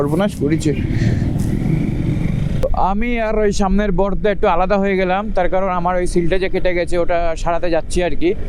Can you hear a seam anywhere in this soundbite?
no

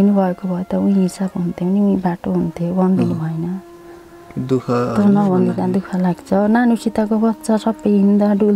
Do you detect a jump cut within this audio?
no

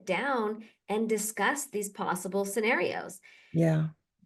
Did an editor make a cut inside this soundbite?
no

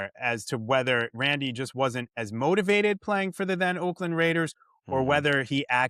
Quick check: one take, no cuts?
yes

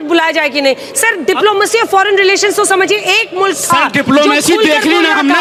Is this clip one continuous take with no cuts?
yes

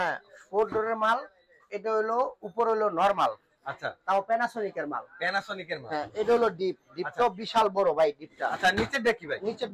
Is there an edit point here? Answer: no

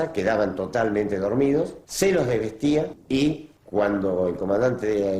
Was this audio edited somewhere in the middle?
yes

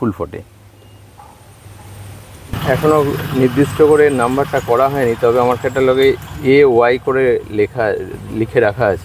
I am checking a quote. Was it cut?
yes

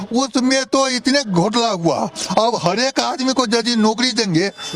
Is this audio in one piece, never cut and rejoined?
yes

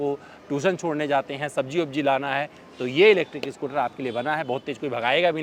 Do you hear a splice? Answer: no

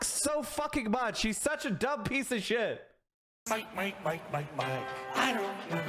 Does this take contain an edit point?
yes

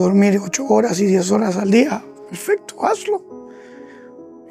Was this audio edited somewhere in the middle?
no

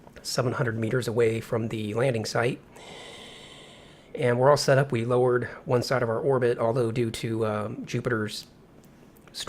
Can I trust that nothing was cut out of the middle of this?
no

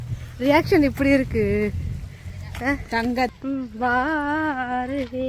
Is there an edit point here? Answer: yes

